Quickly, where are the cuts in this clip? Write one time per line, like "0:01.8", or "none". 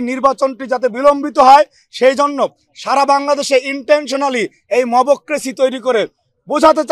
none